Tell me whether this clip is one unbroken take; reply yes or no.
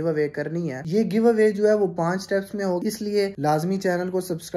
no